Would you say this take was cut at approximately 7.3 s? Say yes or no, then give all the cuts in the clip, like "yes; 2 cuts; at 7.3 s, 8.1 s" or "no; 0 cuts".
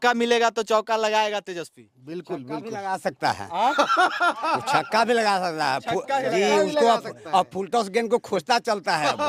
no; 0 cuts